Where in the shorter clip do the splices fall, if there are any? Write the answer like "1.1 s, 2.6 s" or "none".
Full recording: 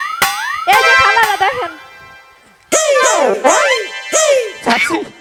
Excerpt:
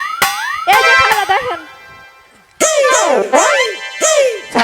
1.1 s